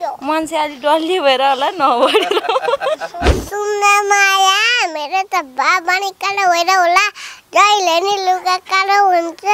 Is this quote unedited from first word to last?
no; 1 cut; at 3.4 s

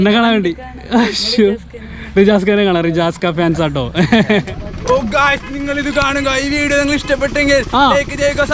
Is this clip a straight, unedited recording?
no; 1 cut; at 4.6 s

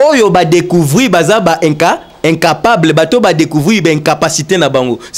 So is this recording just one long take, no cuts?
yes; 0 cuts

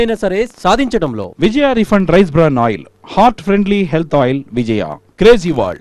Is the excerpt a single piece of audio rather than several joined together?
no; 1 cut; at 1.2 s

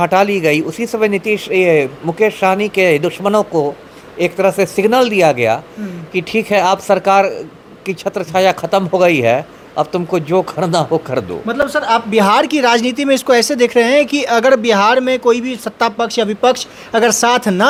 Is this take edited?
no; 0 cuts

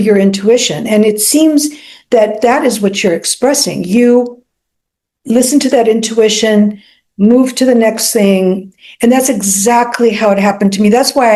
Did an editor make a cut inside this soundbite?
no; 0 cuts

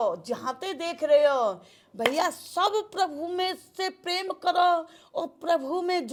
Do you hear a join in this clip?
no; 0 cuts

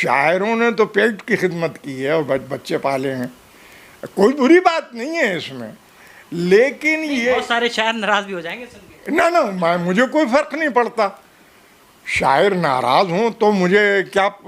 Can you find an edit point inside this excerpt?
no; 0 cuts

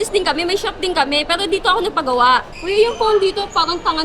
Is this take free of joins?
no; 1 cut; at 2.5 s

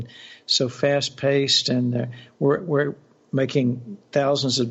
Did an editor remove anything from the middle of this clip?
no; 0 cuts

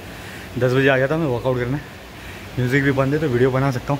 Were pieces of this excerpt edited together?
no; 0 cuts

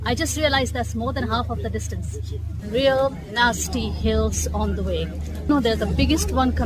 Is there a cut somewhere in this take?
yes; 2 cuts; at 2.5 s, 5.4 s

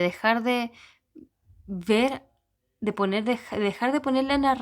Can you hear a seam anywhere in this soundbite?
no; 0 cuts

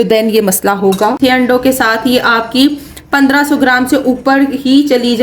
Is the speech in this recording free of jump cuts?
no; 1 cut; at 1.2 s

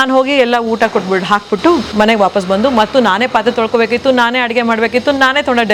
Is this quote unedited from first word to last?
yes; 0 cuts

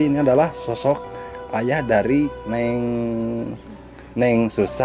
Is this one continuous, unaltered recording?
yes; 0 cuts

